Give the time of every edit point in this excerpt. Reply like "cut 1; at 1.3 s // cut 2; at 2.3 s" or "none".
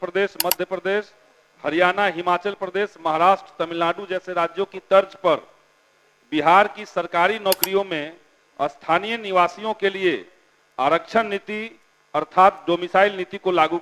none